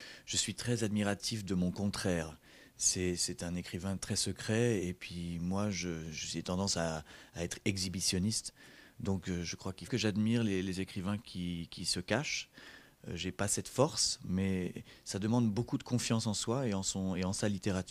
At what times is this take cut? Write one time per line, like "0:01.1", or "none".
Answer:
none